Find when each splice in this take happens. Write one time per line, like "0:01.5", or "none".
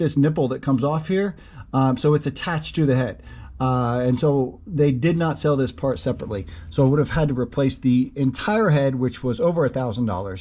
none